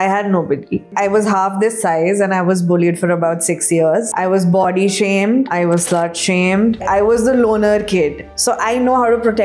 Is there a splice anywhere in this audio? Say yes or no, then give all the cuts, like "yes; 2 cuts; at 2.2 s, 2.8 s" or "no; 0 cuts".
yes; 4 cuts; at 4.1 s, 5.5 s, 6.8 s, 8.3 s